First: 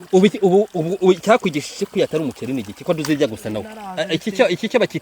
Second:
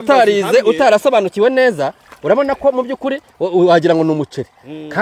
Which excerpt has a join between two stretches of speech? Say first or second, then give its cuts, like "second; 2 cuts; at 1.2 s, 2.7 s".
first; 1 cut; at 3.8 s